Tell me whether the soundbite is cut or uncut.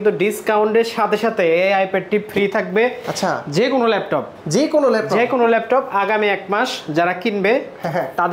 uncut